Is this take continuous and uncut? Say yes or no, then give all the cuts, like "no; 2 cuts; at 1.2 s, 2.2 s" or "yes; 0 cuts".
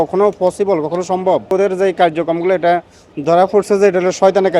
no; 1 cut; at 1.5 s